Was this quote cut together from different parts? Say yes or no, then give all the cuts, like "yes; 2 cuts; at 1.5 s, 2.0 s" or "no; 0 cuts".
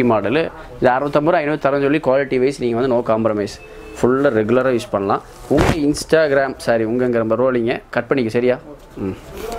no; 0 cuts